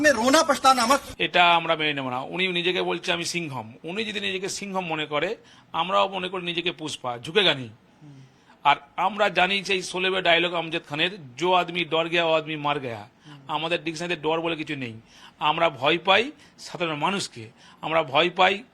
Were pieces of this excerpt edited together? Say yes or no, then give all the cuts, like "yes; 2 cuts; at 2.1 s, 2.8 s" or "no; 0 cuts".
yes; 2 cuts; at 1.1 s, 3.8 s